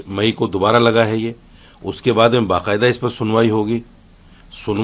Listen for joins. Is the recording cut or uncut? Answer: uncut